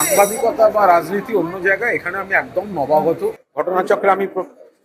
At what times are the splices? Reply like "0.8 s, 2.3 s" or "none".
3.4 s